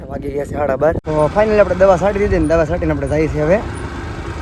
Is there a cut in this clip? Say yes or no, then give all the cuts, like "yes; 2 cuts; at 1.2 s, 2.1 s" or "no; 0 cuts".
yes; 1 cut; at 1.0 s